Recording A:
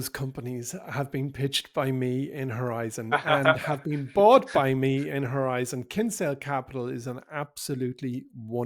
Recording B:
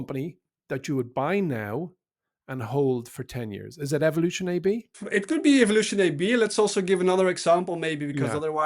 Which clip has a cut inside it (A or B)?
B